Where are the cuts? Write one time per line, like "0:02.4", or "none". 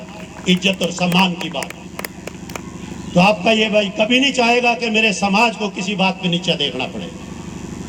none